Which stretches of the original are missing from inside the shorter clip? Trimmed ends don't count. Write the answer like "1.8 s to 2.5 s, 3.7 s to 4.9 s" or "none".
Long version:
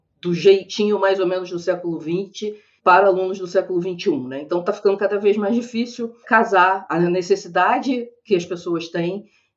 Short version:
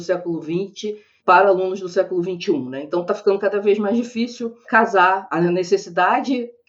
none